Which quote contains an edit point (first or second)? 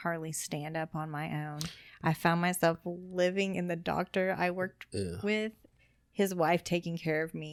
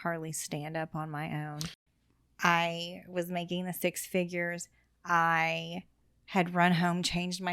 second